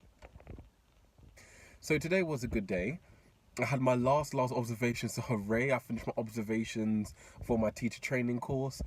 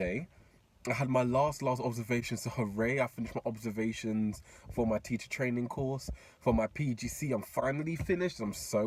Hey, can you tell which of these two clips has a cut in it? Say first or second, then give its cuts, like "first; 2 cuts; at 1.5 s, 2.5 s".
first; 1 cut; at 1.3 s